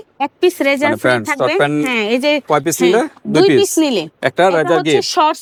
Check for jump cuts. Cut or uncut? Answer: uncut